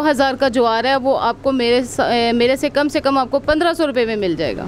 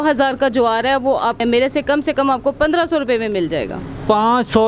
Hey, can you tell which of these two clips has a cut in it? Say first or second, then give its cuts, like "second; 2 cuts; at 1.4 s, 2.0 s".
second; 1 cut; at 1.4 s